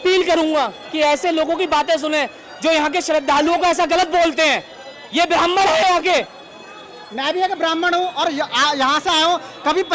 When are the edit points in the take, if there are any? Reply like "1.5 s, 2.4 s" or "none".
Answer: none